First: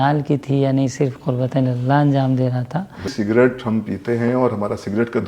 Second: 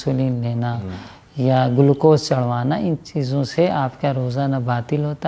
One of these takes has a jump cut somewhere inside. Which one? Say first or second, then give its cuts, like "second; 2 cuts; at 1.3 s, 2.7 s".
first; 1 cut; at 3.1 s